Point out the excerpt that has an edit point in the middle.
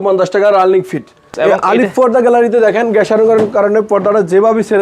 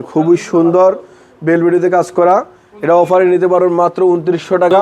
first; 1 cut; at 1.3 s

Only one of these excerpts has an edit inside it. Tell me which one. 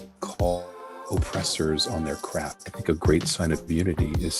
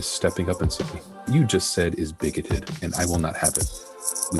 first; 1 cut; at 2.6 s

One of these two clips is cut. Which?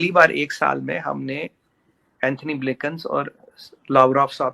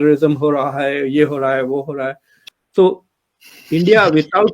second; 1 cut; at 2.5 s

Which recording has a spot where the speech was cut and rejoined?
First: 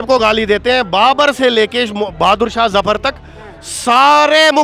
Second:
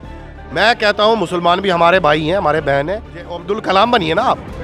second; 1 cut; at 3.4 s

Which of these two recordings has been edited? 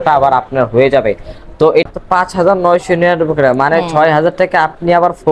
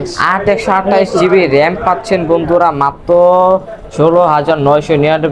first; 1 cut; at 1.9 s

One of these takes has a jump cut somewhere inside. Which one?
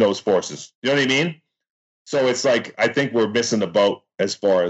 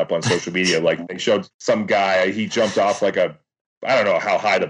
second; 2 cuts; at 1.5 s, 3.7 s

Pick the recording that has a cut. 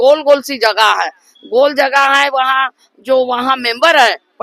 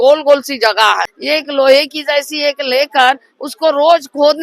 second; 1 cut; at 1.1 s

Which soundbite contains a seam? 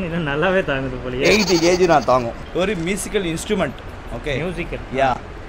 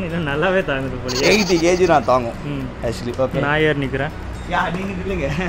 first; 1 cut; at 2.4 s

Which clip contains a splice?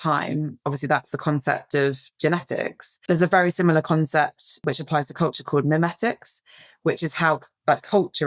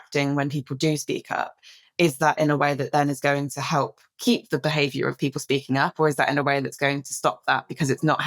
first; 2 cuts; at 2.9 s, 4.6 s

